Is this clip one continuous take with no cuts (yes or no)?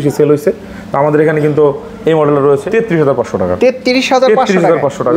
no